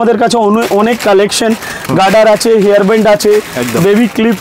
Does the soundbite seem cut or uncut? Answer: uncut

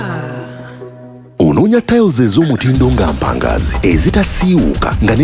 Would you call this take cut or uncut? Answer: uncut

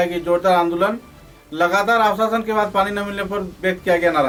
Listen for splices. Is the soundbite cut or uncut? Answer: uncut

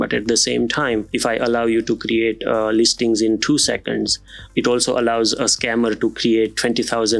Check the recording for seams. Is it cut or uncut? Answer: cut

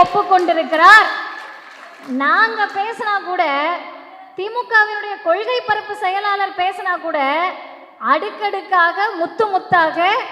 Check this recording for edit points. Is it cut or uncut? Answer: uncut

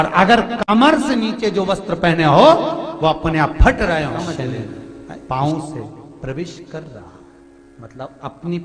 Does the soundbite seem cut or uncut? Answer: cut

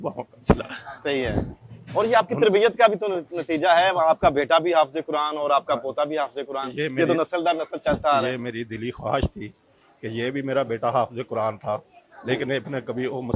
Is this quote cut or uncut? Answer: uncut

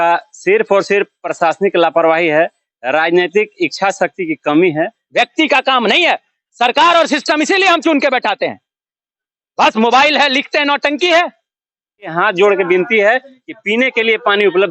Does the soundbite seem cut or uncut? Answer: cut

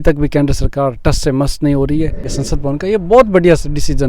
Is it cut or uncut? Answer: cut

